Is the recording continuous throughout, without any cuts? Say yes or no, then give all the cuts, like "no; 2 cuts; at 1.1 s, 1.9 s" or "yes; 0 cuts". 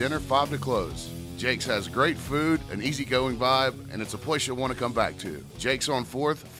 yes; 0 cuts